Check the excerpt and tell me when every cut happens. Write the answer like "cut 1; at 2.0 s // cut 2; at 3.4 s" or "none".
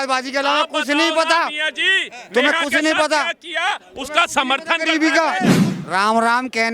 cut 1; at 5.6 s